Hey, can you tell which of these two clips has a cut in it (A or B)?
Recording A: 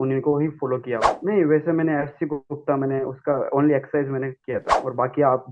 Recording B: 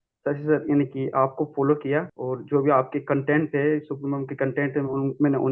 A